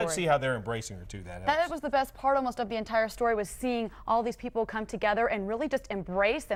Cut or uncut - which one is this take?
uncut